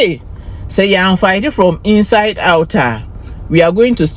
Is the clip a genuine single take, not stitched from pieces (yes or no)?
yes